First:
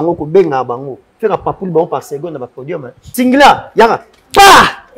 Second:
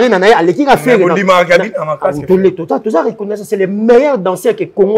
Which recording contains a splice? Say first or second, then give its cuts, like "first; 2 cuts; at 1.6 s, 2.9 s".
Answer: first; 1 cut; at 3.0 s